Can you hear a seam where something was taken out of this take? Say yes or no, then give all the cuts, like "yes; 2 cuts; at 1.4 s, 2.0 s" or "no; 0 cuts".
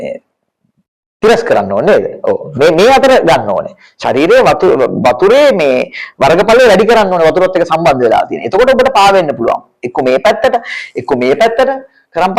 no; 0 cuts